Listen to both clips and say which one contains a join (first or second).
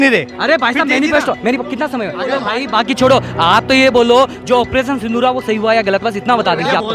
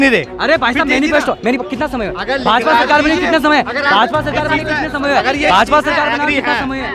first